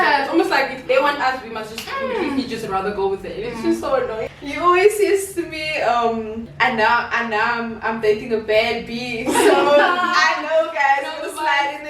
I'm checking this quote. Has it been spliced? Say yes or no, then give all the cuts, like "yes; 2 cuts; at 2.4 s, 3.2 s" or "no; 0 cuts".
yes; 2 cuts; at 4.2 s, 6.4 s